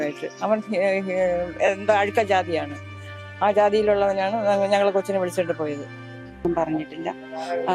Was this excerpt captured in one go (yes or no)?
no